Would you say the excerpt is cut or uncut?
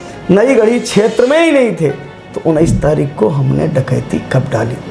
uncut